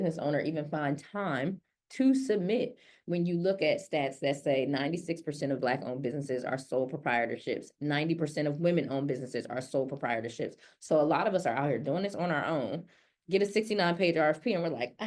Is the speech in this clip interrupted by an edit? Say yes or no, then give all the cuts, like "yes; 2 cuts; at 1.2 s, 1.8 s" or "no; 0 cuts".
no; 0 cuts